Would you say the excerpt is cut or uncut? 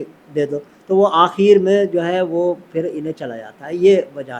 uncut